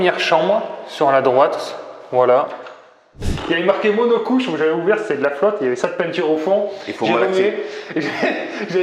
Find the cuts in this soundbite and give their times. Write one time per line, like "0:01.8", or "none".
0:03.3